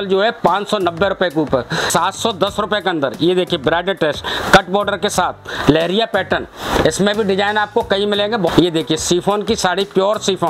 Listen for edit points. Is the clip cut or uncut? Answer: cut